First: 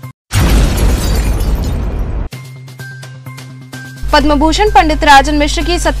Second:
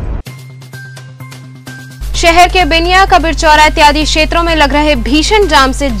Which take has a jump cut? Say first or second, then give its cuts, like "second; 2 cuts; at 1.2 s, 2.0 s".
second; 1 cut; at 1.9 s